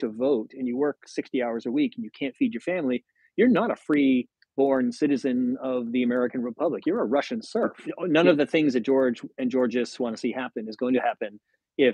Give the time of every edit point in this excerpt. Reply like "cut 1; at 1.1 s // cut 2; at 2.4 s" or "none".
cut 1; at 7.8 s